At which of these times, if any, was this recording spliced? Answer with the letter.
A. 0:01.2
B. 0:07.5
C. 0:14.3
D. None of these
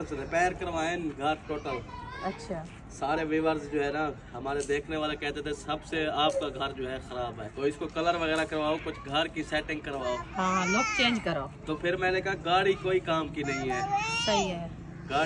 B